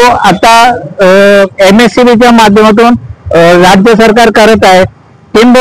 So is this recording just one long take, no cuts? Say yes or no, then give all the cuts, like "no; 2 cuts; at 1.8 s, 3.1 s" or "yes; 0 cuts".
yes; 0 cuts